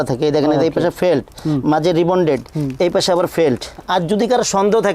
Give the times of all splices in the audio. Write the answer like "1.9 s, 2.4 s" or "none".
3.7 s